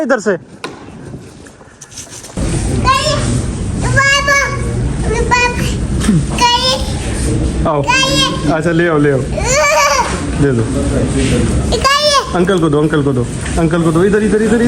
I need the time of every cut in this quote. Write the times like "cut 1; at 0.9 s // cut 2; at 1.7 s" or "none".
cut 1; at 2.4 s

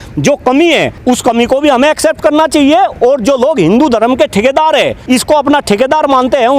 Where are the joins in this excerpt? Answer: cut 1; at 0.9 s // cut 2; at 5.0 s

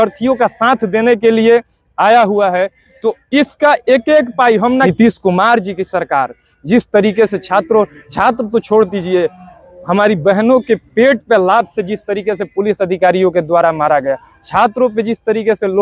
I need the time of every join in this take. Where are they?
cut 1; at 4.9 s

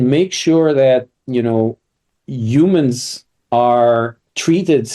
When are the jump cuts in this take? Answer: none

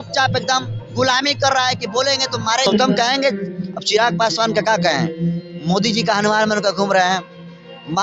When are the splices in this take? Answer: cut 1; at 2.7 s

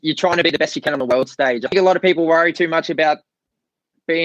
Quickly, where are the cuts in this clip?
cut 1; at 1.6 s

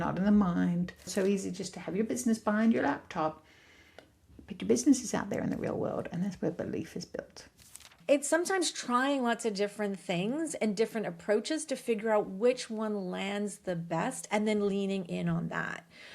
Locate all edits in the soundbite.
cut 1; at 1.1 s // cut 2; at 7.9 s

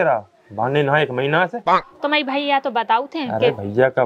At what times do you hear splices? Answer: none

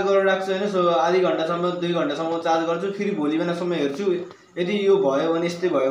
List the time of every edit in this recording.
none

